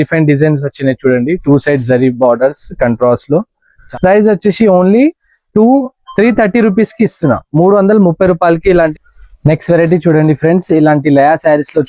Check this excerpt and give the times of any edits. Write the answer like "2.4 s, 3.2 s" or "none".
3.8 s, 9.0 s